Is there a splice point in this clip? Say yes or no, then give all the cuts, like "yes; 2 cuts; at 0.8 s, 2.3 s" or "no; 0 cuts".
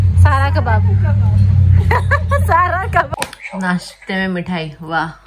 yes; 1 cut; at 3.1 s